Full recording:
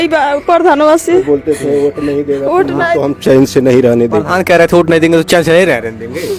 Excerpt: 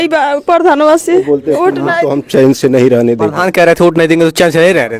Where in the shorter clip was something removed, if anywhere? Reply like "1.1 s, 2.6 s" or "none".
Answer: 1.5 s